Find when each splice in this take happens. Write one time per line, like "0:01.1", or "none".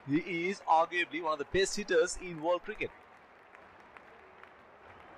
0:02.9